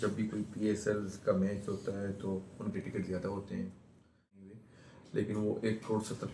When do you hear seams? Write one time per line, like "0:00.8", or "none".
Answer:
0:04.6